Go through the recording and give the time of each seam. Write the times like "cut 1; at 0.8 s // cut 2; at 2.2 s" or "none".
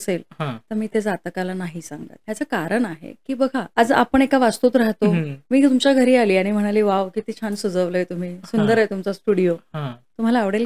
cut 1; at 2.1 s // cut 2; at 3.7 s // cut 3; at 5.3 s